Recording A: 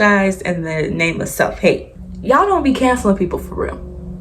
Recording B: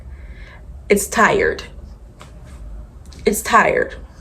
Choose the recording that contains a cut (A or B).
A